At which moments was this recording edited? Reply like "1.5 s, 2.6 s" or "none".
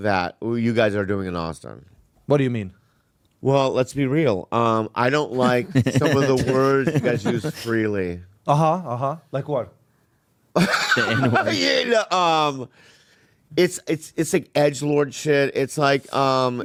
none